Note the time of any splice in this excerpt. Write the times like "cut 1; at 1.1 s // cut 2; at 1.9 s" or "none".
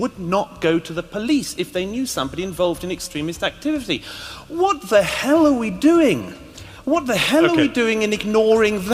none

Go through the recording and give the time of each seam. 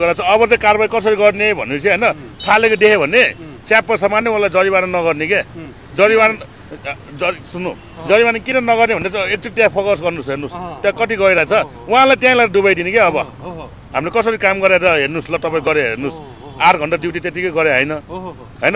none

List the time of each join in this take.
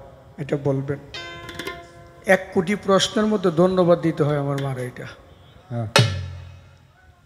none

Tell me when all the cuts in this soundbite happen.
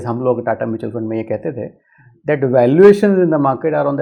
none

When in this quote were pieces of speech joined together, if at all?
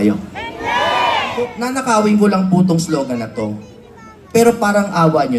cut 1; at 1.7 s

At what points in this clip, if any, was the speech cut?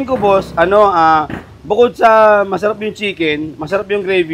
none

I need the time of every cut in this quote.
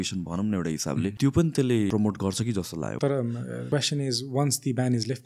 cut 1; at 1.1 s // cut 2; at 1.9 s // cut 3; at 3.0 s // cut 4; at 3.6 s

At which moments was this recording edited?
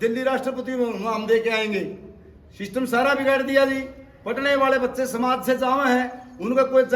none

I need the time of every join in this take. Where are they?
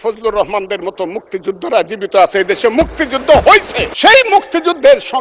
cut 1; at 3.8 s

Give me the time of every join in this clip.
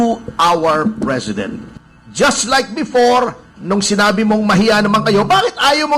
cut 1; at 1.6 s

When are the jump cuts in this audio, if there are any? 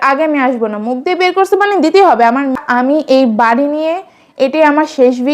cut 1; at 2.6 s

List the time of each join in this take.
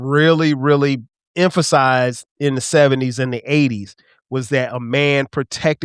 cut 1; at 1.2 s

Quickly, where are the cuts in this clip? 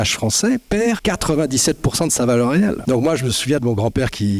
cut 1; at 1.0 s // cut 2; at 2.8 s

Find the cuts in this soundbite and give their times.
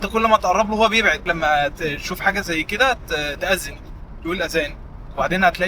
cut 1; at 1.2 s

